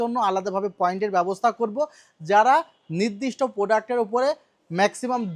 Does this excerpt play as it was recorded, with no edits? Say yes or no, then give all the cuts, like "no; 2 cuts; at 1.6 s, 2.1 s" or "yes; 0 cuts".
yes; 0 cuts